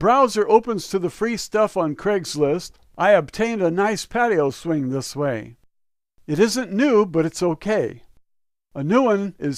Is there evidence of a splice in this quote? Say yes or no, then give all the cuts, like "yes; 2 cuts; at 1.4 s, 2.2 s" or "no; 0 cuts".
no; 0 cuts